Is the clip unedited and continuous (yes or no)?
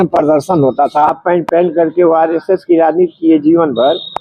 no